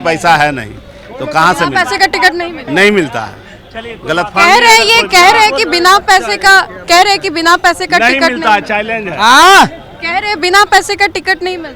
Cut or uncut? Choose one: uncut